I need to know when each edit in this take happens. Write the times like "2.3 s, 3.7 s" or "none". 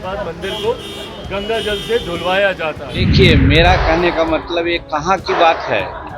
3.0 s